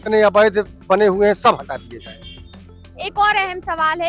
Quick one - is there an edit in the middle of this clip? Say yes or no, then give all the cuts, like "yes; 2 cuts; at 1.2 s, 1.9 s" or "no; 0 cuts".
no; 0 cuts